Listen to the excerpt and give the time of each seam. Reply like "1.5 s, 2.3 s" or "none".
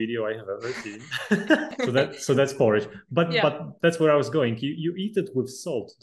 1.7 s